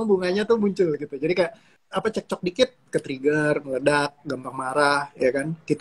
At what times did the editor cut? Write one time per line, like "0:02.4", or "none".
0:01.7